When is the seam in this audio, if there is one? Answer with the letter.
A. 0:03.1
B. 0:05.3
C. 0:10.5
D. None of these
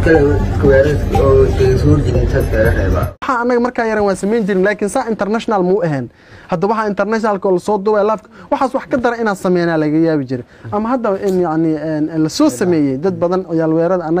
A